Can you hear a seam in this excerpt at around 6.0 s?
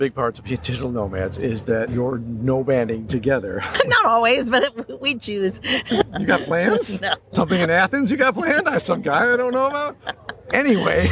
yes; 4 cuts; at 1.9 s, 3.6 s, 6.0 s, 7.2 s

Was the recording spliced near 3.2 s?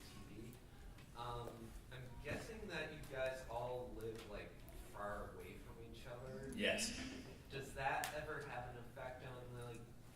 yes; 1 cut; at 3.2 s

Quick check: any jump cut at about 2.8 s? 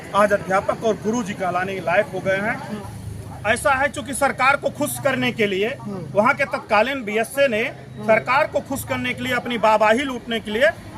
yes; 1 cut; at 2.8 s

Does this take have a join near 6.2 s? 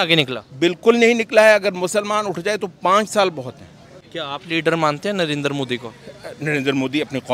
no; 1 cut; at 3.9 s

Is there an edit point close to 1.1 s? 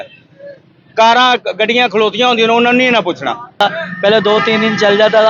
no; 1 cut; at 3.6 s

